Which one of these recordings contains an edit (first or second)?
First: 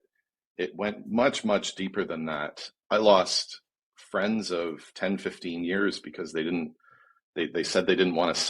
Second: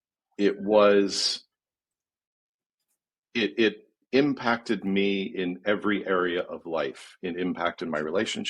first